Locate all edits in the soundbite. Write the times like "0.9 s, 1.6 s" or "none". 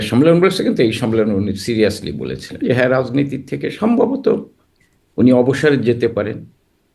2.5 s